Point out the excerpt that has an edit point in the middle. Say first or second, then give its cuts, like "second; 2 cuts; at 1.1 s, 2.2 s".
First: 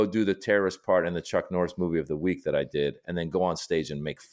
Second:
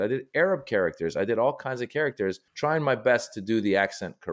second; 1 cut; at 2.5 s